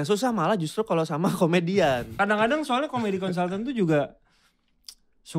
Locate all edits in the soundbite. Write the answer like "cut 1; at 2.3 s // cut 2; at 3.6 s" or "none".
cut 1; at 2.1 s